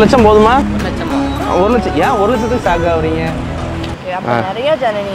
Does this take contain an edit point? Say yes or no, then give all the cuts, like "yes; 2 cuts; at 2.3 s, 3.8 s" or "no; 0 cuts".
yes; 1 cut; at 4.0 s